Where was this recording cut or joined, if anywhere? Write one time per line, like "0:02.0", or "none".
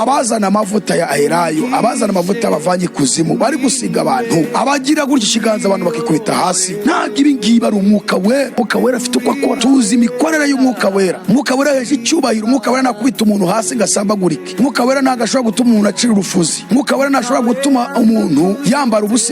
0:09.6